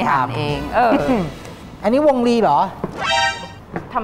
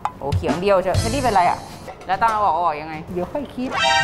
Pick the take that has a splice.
first; 1 cut; at 1.3 s

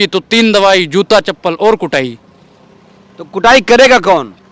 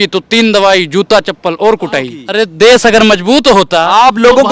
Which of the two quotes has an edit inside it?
second; 1 cut; at 2.2 s

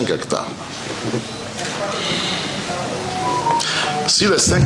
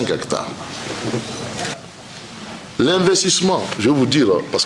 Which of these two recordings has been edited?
second; 1 cut; at 1.7 s

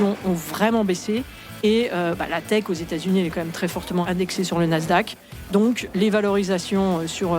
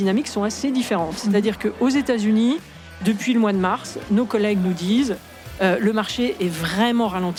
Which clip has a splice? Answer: first; 2 cuts; at 4.0 s, 5.9 s

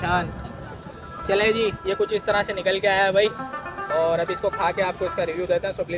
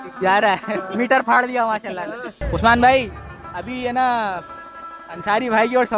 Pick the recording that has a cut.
second; 1 cut; at 2.3 s

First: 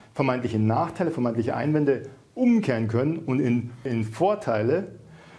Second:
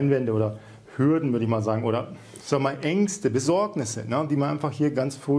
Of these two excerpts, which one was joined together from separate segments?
first; 1 cut; at 3.9 s

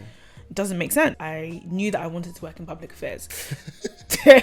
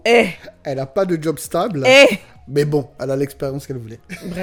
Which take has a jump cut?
first; 2 cuts; at 1.2 s, 3.3 s

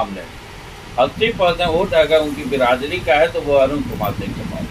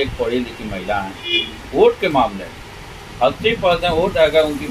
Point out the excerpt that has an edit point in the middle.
second; 1 cut; at 1.3 s

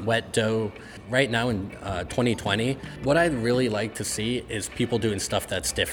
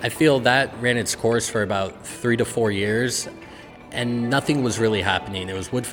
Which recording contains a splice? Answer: first; 2 cuts; at 0.9 s, 2.9 s

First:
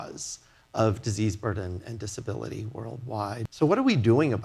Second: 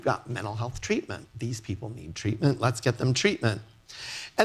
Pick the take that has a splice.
first; 1 cut; at 3.5 s

